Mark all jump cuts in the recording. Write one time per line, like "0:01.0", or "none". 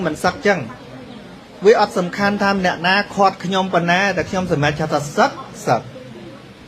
none